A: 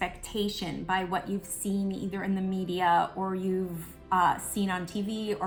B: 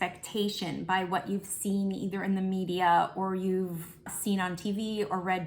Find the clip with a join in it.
B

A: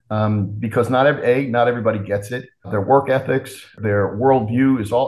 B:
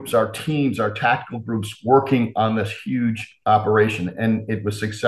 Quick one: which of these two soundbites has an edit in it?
A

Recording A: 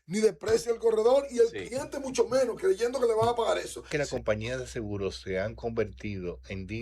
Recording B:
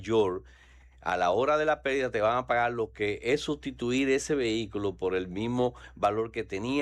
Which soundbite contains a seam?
A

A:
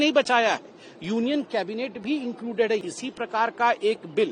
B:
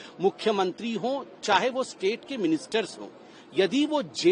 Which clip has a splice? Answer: A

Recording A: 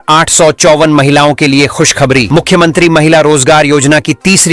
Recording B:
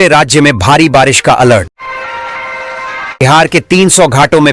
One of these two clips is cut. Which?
B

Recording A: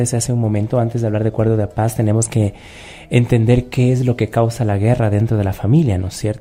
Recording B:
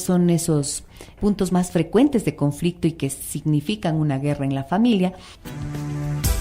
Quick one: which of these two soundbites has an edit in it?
B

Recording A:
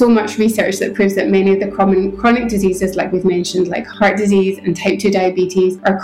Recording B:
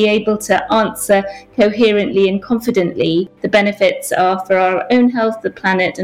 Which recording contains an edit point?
B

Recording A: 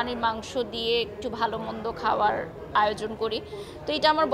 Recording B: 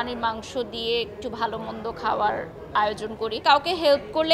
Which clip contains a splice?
B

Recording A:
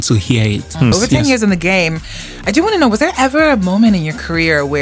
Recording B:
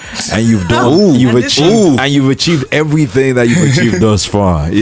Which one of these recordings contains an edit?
A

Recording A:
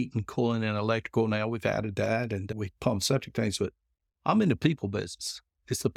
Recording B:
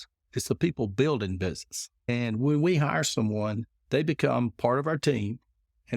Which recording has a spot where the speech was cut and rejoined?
B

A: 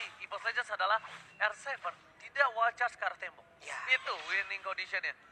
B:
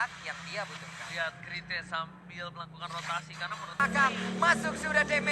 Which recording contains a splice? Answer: B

